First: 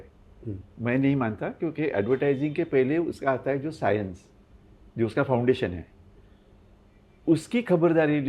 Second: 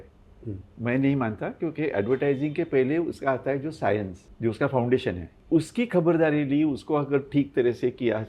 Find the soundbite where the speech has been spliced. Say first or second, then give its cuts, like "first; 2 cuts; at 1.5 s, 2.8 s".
second; 2 cuts; at 4.2 s, 5.3 s